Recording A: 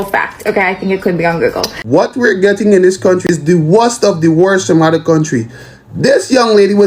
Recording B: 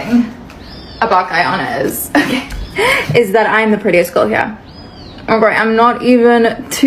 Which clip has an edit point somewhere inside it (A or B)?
A